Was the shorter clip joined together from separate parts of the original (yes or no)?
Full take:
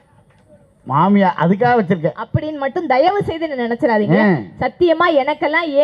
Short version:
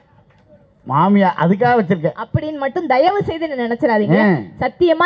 no